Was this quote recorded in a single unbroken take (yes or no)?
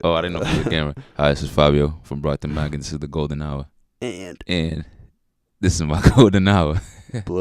no